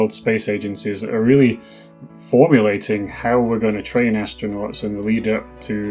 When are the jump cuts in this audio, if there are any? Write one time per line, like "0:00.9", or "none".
none

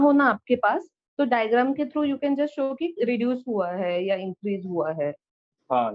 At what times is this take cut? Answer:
none

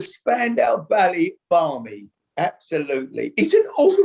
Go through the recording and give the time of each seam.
none

